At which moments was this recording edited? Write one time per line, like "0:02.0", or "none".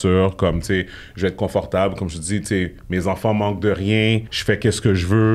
0:04.3